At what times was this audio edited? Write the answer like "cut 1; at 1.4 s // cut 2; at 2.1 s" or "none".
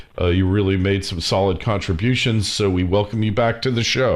cut 1; at 1.8 s